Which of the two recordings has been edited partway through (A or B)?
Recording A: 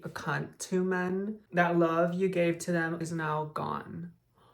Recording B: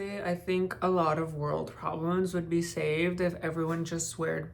A